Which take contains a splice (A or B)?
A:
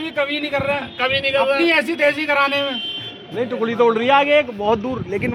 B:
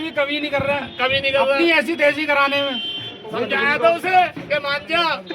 B